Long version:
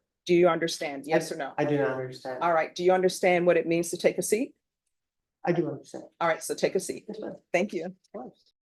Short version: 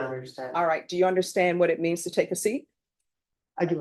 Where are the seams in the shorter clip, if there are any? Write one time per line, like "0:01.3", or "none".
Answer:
none